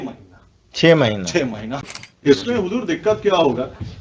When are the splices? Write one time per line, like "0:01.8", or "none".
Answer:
0:01.7